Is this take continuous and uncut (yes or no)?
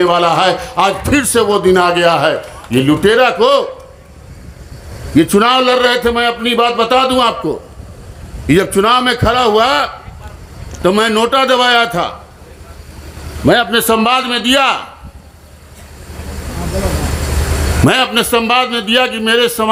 yes